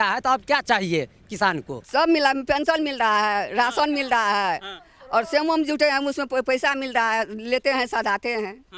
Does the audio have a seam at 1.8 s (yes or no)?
yes